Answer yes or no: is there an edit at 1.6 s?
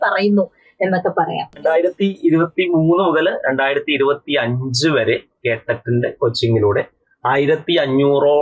yes